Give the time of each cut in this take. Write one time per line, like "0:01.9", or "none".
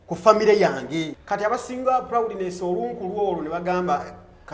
0:01.2